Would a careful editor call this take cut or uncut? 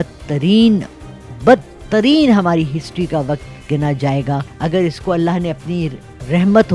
cut